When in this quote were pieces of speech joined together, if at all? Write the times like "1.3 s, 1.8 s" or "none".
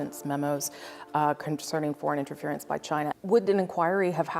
3.1 s